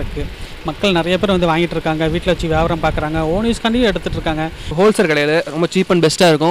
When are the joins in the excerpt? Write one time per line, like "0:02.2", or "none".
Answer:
0:04.7